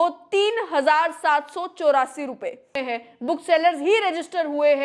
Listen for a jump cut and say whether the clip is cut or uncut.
cut